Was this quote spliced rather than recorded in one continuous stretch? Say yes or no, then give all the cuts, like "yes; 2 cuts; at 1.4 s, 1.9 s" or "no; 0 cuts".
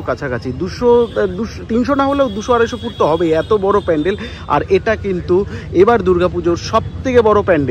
no; 0 cuts